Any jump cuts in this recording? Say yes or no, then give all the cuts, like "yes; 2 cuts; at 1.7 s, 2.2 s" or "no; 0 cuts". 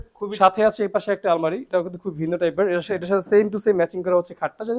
no; 0 cuts